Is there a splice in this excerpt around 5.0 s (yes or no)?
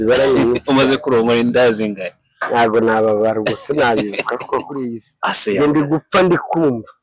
yes